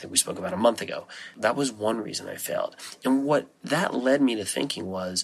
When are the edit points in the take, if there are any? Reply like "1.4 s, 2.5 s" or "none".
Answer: 1.3 s